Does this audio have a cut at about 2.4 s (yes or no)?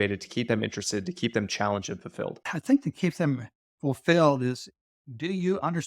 yes